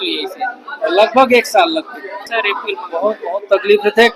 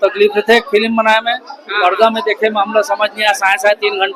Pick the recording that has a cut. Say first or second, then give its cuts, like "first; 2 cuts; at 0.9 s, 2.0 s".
first; 1 cut; at 2.3 s